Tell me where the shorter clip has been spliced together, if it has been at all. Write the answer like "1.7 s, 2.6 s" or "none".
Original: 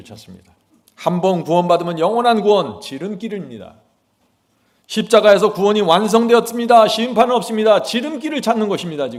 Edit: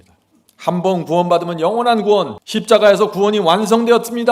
2.4 s

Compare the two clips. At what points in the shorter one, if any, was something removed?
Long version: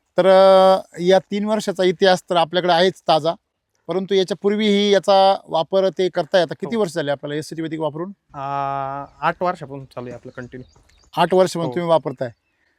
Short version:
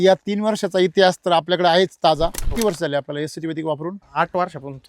2.5 s, 4.0 s

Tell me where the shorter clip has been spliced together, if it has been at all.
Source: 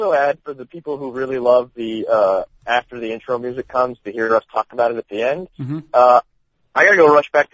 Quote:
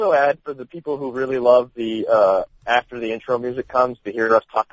none

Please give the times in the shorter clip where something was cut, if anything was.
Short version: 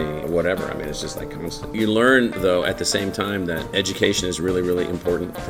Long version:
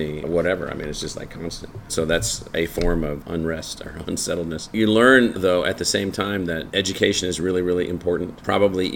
1.6 s

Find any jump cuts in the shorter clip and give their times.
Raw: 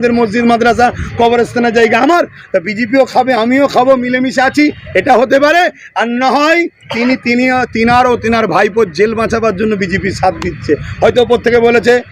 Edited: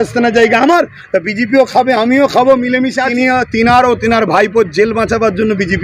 3.1 s

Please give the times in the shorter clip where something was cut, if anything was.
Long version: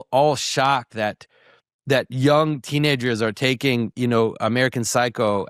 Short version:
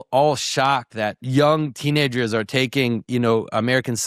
1.2 s

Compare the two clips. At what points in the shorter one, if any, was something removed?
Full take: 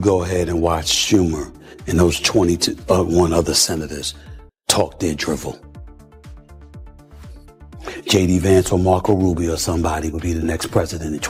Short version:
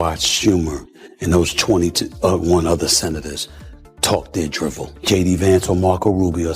5.0 s

